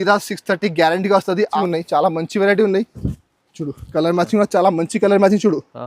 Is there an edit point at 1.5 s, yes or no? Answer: yes